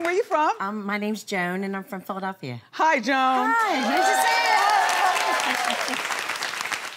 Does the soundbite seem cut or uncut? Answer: cut